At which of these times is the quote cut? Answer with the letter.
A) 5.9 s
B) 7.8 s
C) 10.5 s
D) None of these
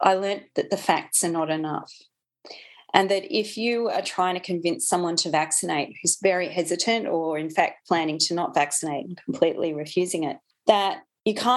C